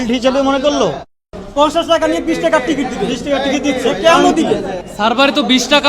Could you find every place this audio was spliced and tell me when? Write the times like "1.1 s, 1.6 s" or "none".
1.2 s, 4.8 s

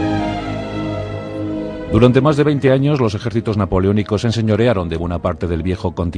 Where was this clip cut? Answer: none

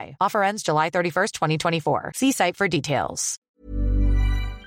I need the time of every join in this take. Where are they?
3.3 s

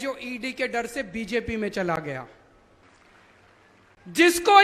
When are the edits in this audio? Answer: 2.8 s

